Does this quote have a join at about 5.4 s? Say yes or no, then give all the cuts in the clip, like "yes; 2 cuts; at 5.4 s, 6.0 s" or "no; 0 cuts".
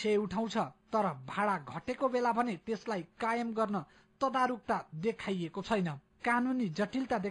yes; 1 cut; at 5.4 s